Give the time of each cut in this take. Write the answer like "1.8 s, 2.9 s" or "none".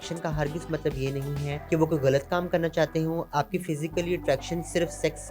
1.5 s, 3.3 s

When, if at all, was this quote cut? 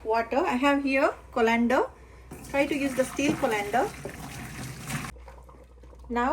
5.1 s

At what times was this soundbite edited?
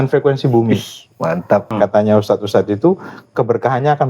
1.7 s

